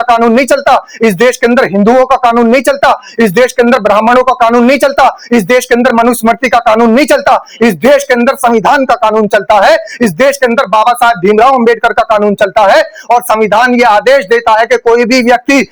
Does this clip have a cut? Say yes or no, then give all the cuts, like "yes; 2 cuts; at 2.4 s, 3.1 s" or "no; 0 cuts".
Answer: no; 0 cuts